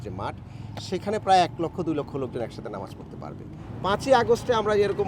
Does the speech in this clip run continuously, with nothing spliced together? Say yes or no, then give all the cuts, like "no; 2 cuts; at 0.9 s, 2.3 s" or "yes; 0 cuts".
no; 1 cut; at 3.7 s